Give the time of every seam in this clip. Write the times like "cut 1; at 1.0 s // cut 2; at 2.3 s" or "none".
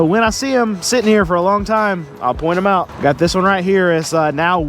cut 1; at 2.9 s